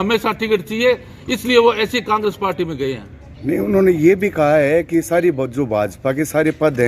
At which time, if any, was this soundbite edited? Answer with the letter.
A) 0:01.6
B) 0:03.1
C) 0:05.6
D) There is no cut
D